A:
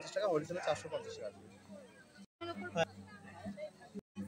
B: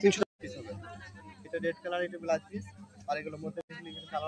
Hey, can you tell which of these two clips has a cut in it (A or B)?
A